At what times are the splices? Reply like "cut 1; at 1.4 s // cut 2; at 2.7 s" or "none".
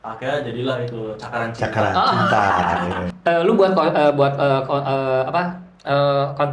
cut 1; at 3.0 s

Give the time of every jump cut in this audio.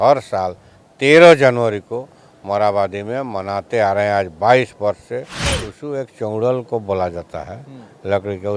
cut 1; at 5.6 s

